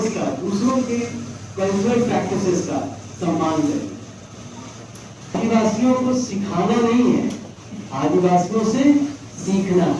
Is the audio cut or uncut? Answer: cut